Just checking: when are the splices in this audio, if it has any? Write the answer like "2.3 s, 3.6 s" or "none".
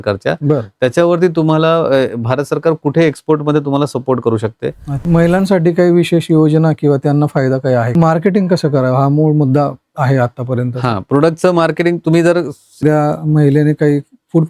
4.9 s, 7.9 s, 12.8 s

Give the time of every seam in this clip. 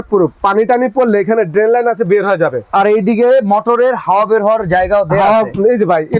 none

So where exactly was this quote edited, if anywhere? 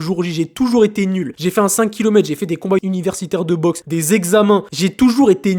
1.3 s, 2.8 s, 3.8 s, 4.7 s

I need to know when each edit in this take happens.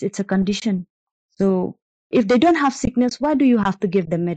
1.6 s

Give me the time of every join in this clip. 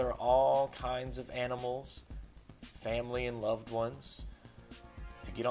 4.0 s

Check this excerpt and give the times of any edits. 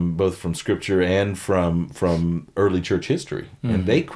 none

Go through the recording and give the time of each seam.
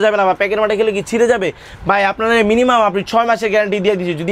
none

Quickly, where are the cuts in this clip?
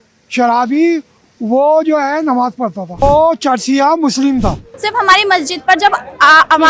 3.0 s, 4.6 s

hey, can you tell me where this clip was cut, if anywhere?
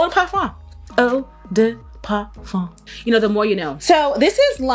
none

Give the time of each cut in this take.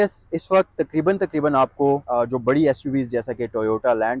2.0 s

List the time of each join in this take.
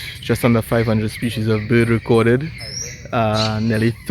none

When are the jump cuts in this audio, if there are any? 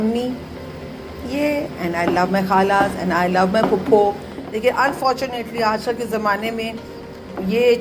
4.3 s

